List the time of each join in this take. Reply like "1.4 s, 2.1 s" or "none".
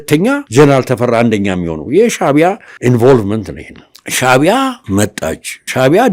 none